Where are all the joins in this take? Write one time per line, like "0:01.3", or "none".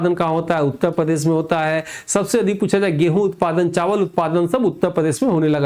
none